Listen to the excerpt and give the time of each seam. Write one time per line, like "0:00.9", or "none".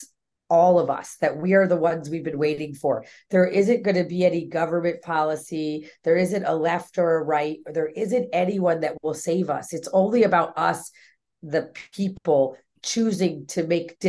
none